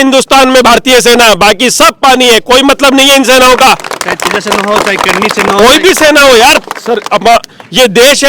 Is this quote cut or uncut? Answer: uncut